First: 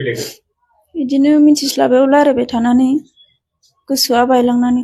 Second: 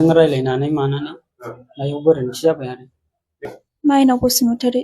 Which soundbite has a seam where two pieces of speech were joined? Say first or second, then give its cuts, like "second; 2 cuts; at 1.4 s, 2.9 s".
second; 1 cut; at 3.5 s